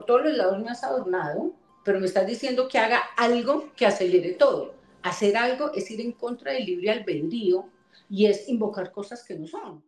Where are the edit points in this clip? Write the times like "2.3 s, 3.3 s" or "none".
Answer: none